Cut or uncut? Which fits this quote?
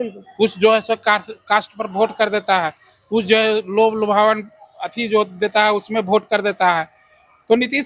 uncut